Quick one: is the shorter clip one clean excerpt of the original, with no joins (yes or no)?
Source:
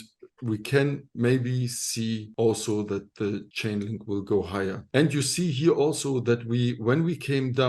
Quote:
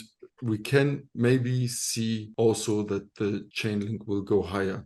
yes